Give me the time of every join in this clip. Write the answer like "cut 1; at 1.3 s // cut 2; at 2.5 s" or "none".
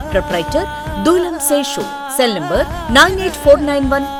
none